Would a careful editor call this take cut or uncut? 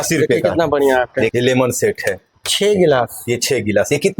cut